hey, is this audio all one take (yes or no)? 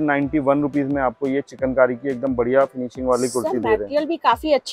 yes